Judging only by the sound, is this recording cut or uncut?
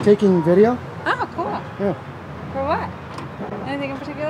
uncut